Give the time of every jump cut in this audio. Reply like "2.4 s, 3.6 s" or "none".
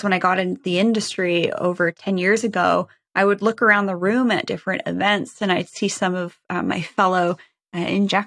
2.0 s